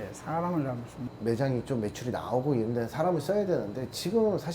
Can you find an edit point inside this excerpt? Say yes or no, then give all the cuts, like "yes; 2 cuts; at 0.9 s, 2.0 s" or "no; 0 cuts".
yes; 1 cut; at 1.1 s